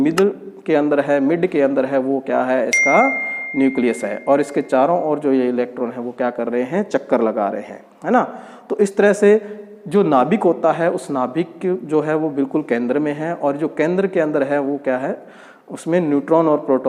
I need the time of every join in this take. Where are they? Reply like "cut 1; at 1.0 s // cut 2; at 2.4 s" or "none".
none

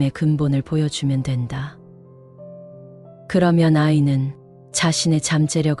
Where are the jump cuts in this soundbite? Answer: cut 1; at 1.8 s // cut 2; at 3.3 s

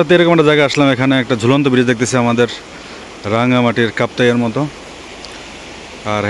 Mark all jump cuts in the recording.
none

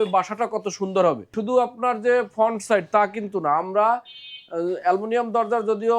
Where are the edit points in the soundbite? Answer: cut 1; at 1.3 s

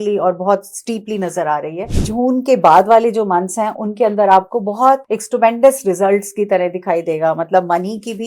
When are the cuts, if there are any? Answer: cut 1; at 2.0 s

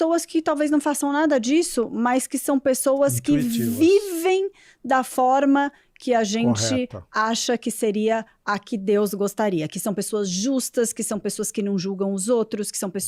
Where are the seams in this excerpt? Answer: none

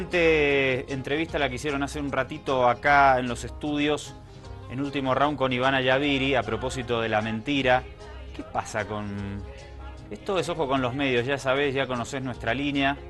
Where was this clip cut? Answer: cut 1; at 11.6 s

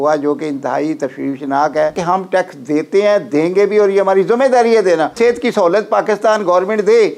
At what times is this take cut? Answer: cut 1; at 2.0 s // cut 2; at 5.2 s

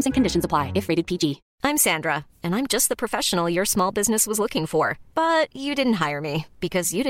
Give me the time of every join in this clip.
cut 1; at 1.5 s

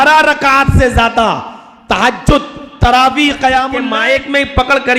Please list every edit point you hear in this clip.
cut 1; at 3.8 s

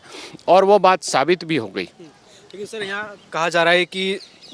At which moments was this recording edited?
none

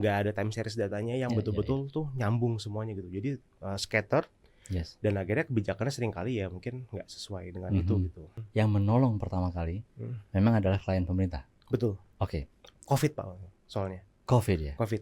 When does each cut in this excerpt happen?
cut 1; at 8.3 s

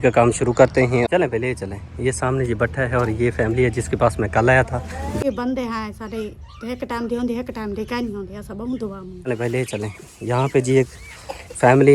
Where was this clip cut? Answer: cut 1; at 1.1 s // cut 2; at 5.2 s // cut 3; at 9.1 s

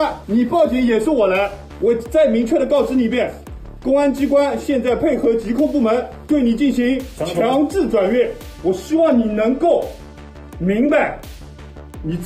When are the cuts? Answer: cut 1; at 1.6 s // cut 2; at 8.4 s

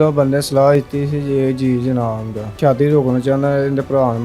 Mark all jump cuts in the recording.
cut 1; at 2.5 s

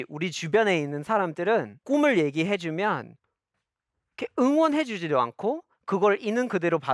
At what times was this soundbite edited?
cut 1; at 1.8 s

